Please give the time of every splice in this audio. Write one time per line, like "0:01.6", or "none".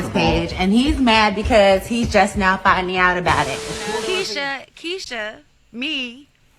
0:03.7